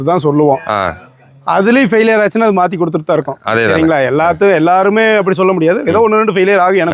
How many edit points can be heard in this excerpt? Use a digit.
0